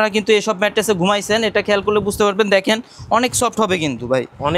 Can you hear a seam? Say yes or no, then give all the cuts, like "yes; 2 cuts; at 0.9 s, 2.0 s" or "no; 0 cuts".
no; 0 cuts